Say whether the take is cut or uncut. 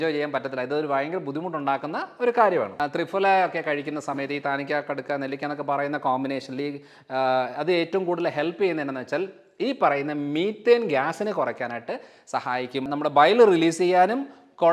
cut